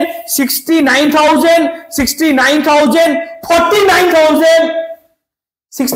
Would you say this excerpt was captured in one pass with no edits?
yes; 0 cuts

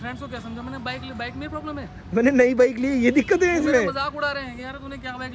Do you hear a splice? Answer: no; 0 cuts

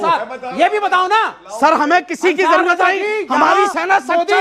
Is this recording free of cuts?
yes; 0 cuts

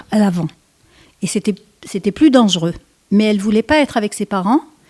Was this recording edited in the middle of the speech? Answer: no; 0 cuts

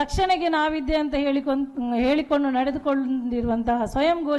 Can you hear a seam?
no; 0 cuts

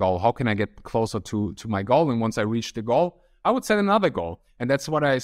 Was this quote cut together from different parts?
no; 0 cuts

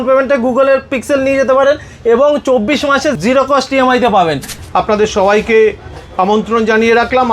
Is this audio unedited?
no; 2 cuts; at 3.2 s, 4.5 s

